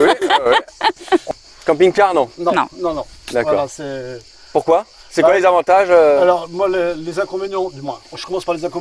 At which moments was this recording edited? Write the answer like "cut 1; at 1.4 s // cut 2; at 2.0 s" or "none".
cut 1; at 1.2 s

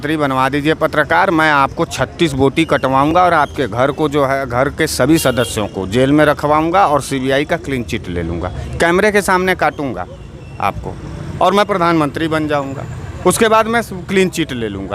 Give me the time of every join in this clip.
none

